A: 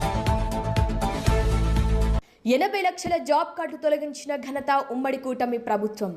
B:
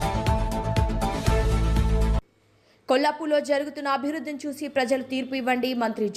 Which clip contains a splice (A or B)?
A